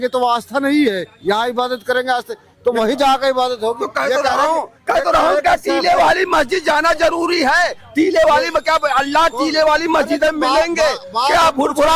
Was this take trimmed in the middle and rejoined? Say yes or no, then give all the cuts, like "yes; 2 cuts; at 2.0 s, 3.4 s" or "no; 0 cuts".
no; 0 cuts